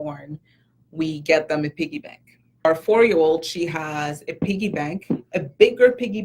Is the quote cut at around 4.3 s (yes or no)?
no